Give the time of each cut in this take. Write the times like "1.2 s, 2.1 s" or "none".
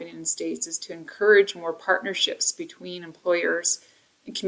none